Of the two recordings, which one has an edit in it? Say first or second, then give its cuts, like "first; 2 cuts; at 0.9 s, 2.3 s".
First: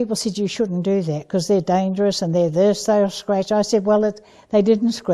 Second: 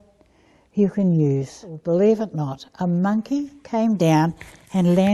second; 1 cut; at 1.7 s